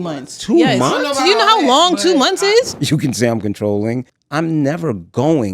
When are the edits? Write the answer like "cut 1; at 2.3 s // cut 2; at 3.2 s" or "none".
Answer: cut 1; at 2.7 s // cut 2; at 4.1 s